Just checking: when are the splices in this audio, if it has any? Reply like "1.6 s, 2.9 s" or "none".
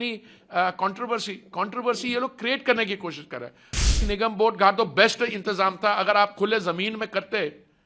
3.9 s